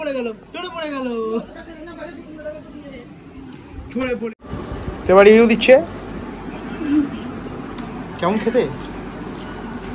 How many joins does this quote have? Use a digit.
0